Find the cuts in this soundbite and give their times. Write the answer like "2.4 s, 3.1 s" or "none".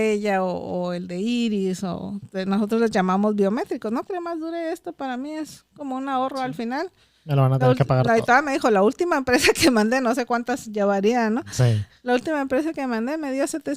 4.0 s